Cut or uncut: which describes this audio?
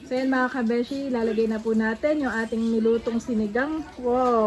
uncut